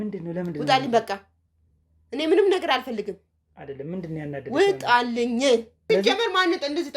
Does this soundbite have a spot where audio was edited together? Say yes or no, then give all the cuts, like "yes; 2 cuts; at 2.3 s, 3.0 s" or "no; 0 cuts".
yes; 1 cut; at 5.7 s